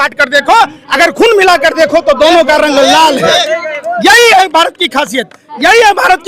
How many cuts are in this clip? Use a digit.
0